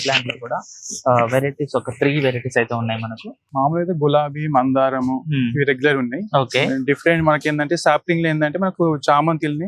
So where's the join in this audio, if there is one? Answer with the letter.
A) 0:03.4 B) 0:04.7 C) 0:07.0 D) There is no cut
A